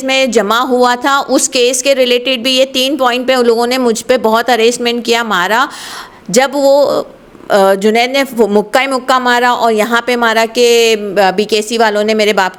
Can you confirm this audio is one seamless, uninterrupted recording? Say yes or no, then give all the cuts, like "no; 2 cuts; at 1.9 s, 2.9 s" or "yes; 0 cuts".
yes; 0 cuts